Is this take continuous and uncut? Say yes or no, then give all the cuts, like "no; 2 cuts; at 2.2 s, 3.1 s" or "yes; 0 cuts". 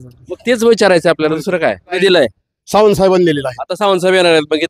no; 1 cut; at 2.0 s